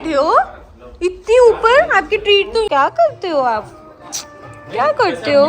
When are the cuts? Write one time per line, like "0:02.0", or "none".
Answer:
0:02.7